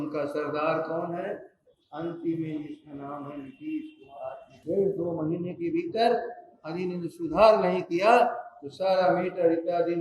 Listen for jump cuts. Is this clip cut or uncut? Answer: cut